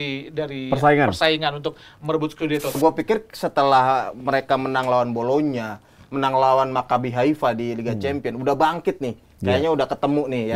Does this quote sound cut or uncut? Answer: cut